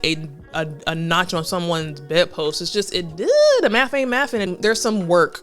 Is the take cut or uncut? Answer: cut